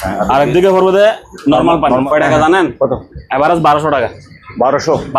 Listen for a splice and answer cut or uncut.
cut